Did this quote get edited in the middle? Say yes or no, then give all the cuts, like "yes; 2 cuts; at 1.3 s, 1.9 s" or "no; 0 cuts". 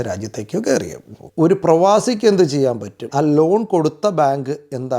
yes; 2 cuts; at 1.2 s, 3.0 s